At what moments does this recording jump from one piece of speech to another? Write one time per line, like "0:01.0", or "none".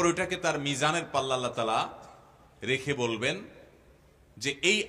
none